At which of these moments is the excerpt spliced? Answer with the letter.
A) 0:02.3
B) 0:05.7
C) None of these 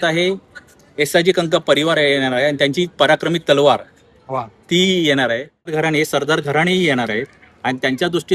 B